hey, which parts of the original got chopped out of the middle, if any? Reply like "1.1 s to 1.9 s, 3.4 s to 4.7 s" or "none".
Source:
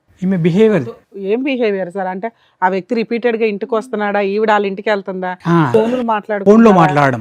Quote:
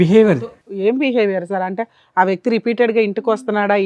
none